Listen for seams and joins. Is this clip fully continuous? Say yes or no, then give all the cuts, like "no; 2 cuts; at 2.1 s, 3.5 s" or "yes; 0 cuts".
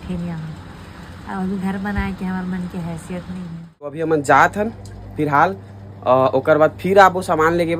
no; 1 cut; at 4.0 s